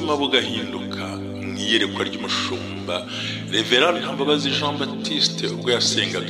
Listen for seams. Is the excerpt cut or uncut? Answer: uncut